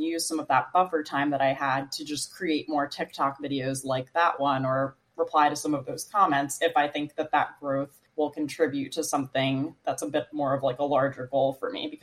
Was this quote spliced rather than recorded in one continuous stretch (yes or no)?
yes